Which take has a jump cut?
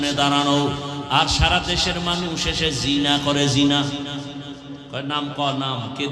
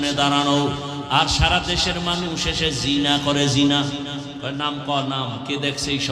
second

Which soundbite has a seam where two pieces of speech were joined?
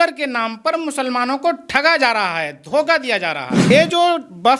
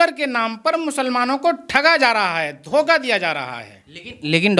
first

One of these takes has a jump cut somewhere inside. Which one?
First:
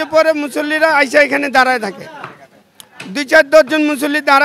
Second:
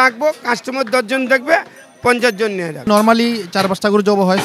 second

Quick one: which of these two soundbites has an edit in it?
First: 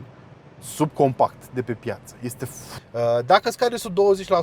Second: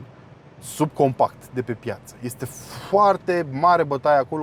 first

